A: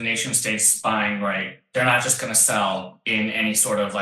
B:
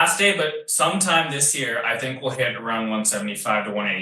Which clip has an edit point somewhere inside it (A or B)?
A